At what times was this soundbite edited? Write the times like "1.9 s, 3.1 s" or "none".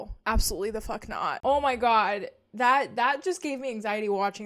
none